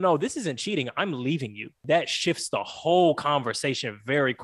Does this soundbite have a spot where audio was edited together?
yes; 1 cut; at 1.8 s

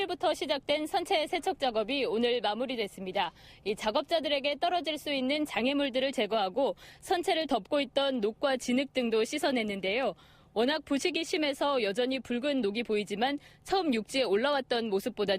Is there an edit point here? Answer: yes; 1 cut; at 12.1 s

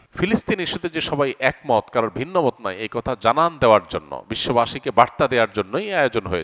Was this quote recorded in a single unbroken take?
yes; 0 cuts

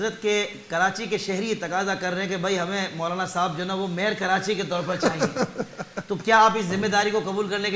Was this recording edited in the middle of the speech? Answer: no; 0 cuts

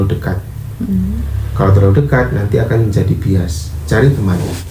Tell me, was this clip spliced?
no; 0 cuts

